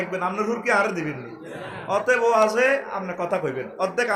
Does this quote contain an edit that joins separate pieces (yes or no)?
no